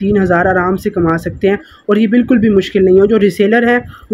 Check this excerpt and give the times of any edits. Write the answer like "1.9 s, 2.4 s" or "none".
none